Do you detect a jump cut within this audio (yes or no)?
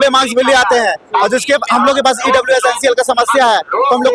no